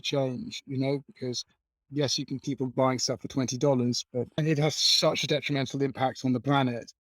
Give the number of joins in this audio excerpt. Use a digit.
1